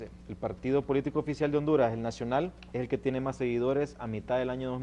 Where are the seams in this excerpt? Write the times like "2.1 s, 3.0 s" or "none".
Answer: none